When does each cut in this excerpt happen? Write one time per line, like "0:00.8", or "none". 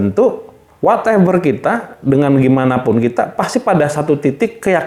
none